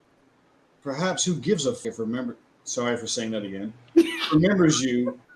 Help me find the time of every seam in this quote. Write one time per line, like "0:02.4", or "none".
0:01.8